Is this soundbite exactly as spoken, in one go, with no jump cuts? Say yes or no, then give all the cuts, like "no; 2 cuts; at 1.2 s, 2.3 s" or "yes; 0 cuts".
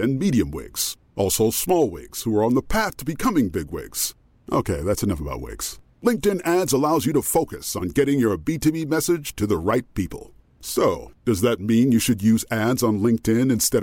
yes; 0 cuts